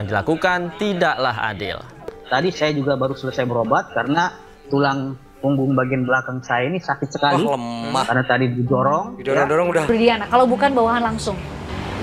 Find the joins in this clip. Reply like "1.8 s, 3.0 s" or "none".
2.1 s, 9.8 s